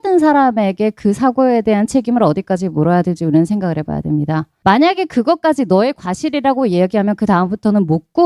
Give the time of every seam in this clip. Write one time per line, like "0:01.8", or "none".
0:04.5